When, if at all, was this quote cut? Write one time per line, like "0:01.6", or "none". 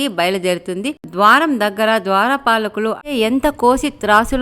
0:03.1